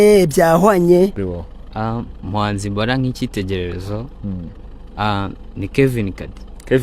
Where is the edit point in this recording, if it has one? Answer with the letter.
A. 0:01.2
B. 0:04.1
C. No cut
A